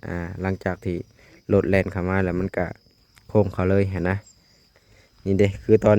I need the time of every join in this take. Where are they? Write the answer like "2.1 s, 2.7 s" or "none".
4.7 s